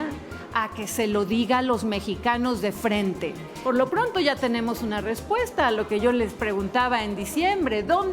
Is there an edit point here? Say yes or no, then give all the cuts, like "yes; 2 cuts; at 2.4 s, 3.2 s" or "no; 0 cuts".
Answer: yes; 1 cut; at 3.5 s